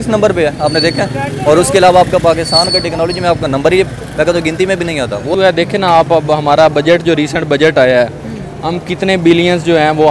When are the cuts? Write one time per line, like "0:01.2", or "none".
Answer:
0:05.3